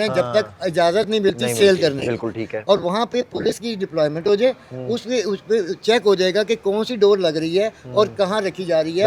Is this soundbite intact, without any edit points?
yes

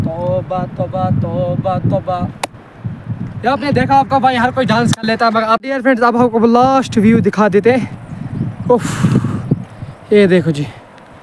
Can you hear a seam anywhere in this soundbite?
yes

